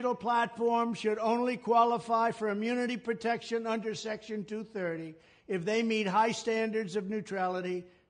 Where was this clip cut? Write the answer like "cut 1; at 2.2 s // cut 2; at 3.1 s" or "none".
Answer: none